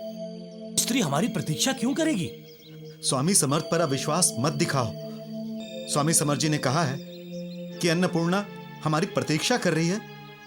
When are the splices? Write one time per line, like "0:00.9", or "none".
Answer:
none